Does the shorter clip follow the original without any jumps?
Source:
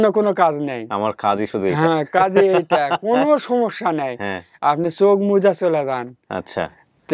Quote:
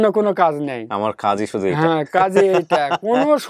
yes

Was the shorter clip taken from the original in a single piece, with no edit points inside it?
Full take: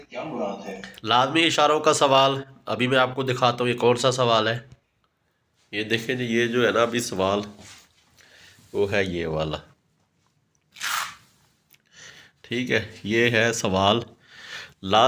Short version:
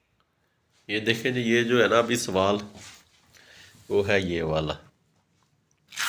yes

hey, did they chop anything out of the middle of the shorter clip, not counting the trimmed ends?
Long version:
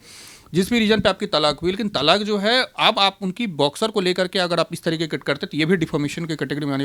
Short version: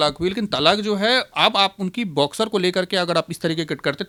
no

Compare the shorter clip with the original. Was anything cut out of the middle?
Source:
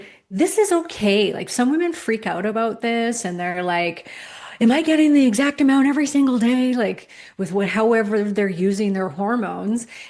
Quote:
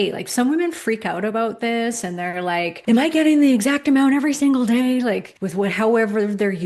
yes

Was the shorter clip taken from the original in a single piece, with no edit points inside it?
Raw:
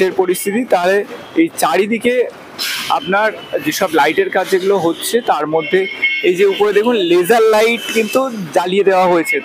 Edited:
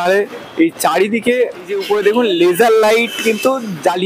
no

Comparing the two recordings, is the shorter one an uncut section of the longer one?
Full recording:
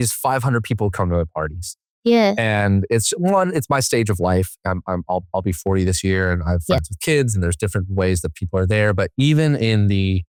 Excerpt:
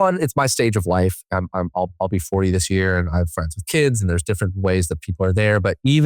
yes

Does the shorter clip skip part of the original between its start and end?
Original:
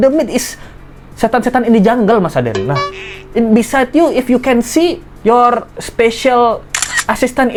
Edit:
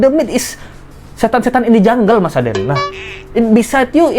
no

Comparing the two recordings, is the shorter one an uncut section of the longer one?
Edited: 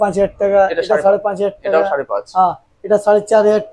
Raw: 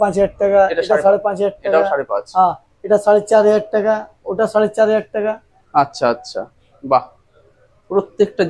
yes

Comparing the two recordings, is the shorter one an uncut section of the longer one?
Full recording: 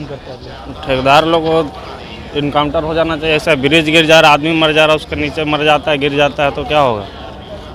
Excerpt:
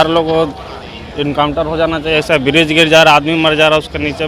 yes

